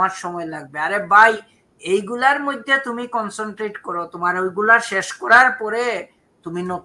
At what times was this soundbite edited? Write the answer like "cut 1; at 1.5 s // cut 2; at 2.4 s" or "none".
none